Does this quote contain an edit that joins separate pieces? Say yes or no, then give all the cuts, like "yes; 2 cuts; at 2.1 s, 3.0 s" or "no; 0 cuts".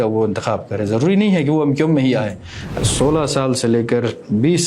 yes; 1 cut; at 2.7 s